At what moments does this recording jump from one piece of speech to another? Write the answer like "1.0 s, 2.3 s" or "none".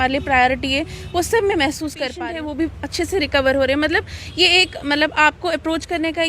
2.2 s